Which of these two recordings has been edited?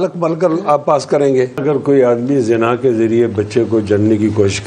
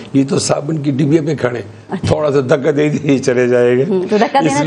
first; 1 cut; at 1.6 s

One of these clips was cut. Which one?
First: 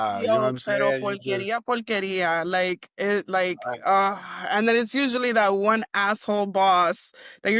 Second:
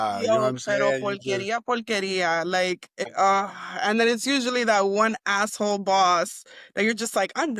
second; 1 cut; at 3.0 s

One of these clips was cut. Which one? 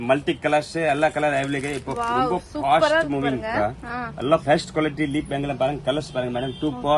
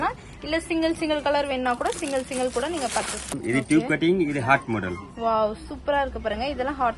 second; 1 cut; at 3.4 s

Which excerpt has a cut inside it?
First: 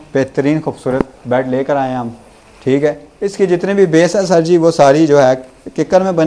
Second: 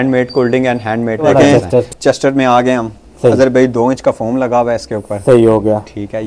second; 1 cut; at 1.2 s

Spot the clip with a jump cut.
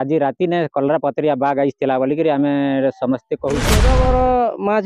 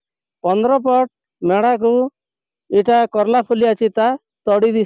first; 1 cut; at 3.8 s

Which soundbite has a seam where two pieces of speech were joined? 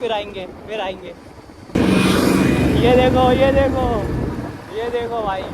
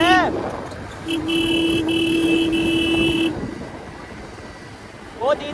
first; 1 cut; at 1.7 s

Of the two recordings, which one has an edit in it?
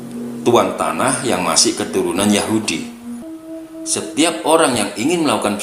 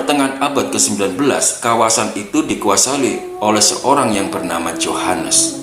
first; 1 cut; at 3.2 s

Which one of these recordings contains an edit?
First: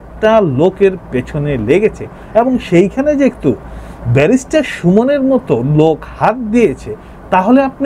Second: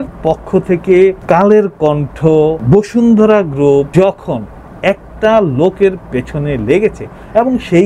second; 3 cuts; at 1.2 s, 2.6 s, 3.9 s

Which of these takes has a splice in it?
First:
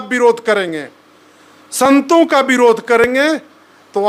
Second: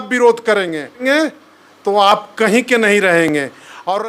second; 1 cut; at 1.0 s

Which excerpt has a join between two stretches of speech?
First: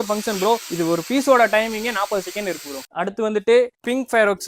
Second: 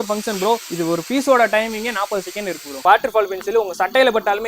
second; 1 cut; at 2.8 s

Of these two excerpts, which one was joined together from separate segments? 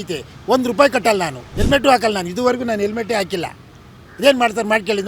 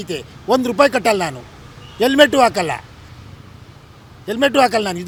first; 1 cut; at 1.4 s

